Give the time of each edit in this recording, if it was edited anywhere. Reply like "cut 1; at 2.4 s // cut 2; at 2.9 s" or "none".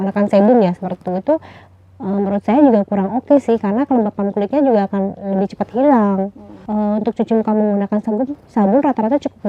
cut 1; at 6.6 s